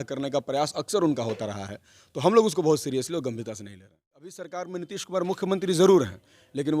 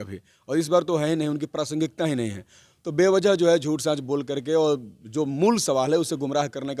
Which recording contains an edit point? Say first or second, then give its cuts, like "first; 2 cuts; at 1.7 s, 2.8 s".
first; 1 cut; at 4.3 s